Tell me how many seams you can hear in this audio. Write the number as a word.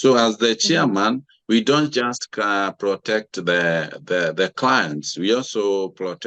zero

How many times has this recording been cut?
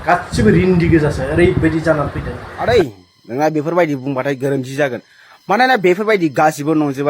one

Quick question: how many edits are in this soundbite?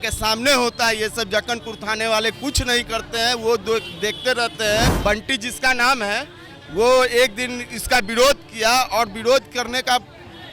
one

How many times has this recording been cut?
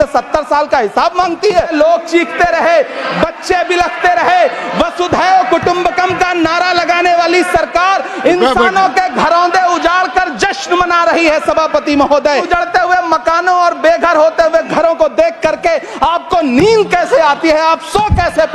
two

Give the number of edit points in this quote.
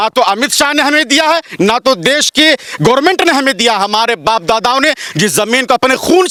zero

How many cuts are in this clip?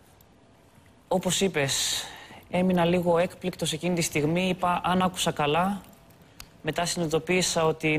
one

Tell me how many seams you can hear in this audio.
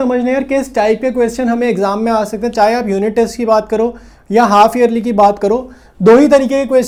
zero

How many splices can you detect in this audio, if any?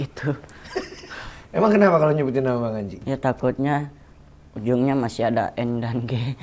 one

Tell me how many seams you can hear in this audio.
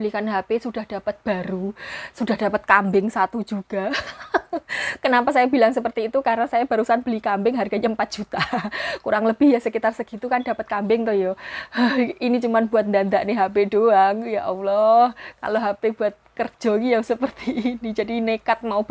zero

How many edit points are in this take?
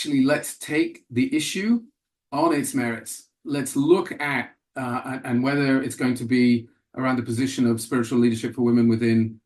zero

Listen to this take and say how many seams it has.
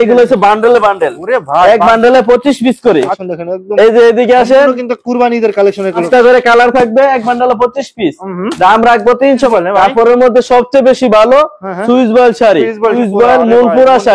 four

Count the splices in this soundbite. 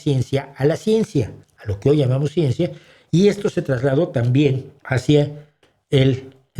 one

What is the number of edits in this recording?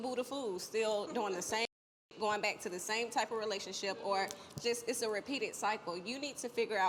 zero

